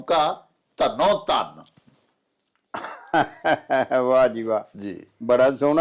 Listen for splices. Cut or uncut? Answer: uncut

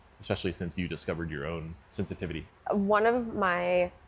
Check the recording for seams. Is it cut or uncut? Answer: cut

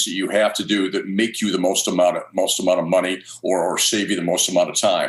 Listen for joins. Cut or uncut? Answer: uncut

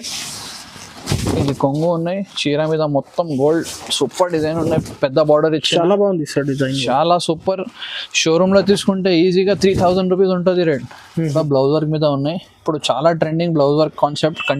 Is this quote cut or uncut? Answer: cut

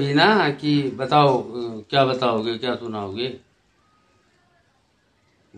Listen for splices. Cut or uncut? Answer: uncut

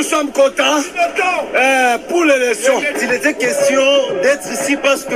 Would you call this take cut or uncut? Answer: uncut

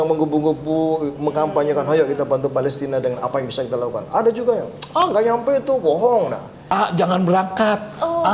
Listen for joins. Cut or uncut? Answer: cut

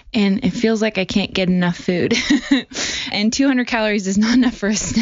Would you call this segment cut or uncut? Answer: cut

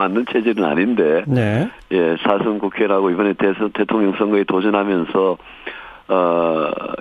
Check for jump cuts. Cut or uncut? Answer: cut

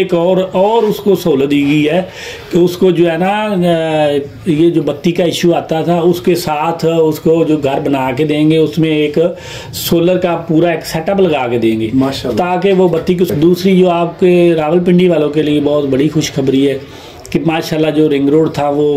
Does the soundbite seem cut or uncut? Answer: cut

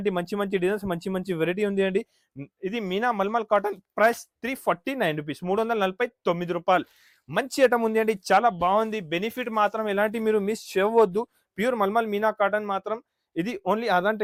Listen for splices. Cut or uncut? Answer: uncut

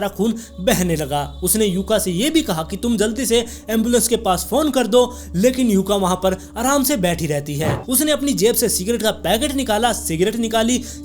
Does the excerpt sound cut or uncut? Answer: cut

